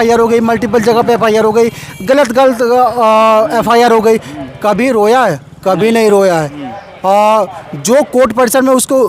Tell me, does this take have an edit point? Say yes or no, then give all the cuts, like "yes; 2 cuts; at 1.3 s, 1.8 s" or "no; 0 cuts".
no; 0 cuts